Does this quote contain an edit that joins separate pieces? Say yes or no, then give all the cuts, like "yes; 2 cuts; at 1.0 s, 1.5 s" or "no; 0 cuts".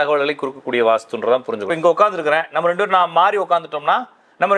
yes; 1 cut; at 1.7 s